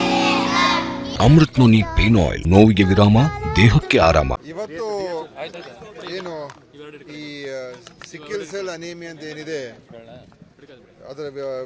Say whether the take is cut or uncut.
cut